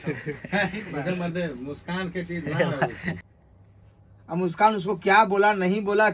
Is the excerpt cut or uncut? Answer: uncut